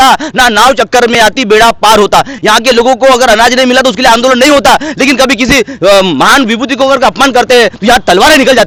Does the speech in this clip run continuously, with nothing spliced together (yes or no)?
yes